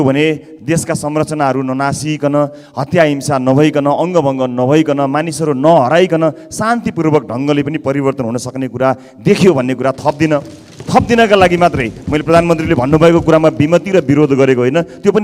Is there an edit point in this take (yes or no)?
no